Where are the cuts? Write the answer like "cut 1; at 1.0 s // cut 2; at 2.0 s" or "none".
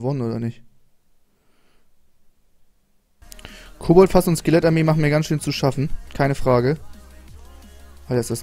cut 1; at 3.2 s